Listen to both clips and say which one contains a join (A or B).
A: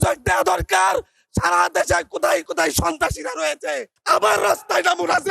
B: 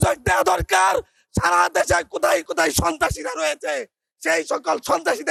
A